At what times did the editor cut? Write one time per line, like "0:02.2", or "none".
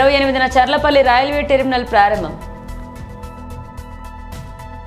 none